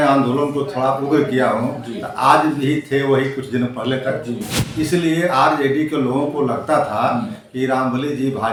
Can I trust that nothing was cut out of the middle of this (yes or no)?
yes